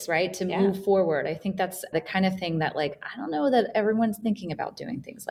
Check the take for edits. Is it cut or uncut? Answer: uncut